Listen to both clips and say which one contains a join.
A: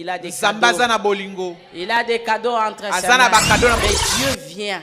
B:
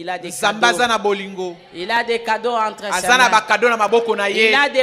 A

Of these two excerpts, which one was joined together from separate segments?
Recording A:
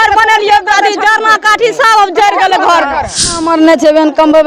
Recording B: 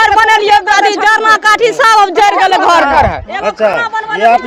A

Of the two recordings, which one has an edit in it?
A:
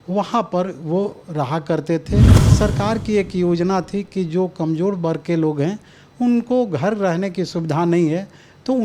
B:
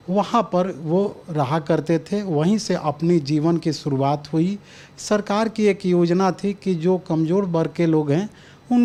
A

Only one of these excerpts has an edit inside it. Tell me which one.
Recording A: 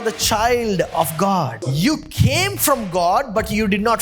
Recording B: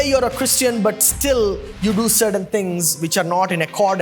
A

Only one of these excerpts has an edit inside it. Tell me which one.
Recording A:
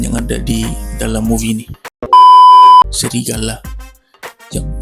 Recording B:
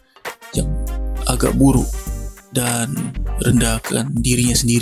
A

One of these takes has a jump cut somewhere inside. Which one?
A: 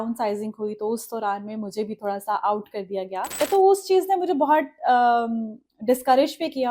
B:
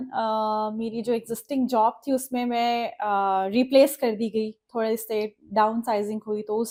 A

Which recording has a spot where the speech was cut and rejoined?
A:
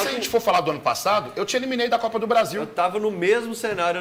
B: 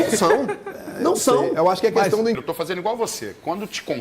B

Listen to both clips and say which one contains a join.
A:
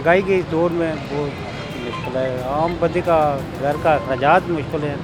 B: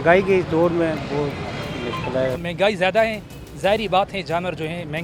B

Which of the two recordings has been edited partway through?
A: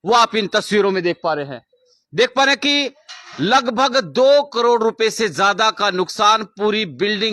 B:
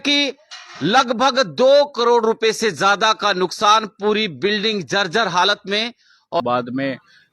B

